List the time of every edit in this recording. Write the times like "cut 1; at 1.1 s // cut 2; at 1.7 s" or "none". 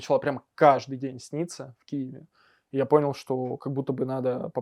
none